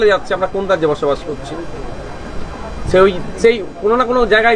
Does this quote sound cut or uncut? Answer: uncut